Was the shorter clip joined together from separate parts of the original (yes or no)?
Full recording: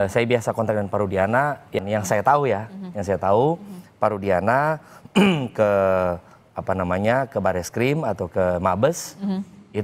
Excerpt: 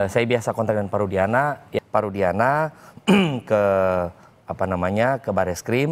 yes